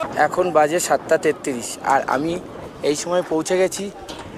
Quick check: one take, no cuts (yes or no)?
yes